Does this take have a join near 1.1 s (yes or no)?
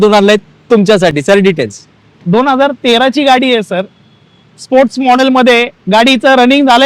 no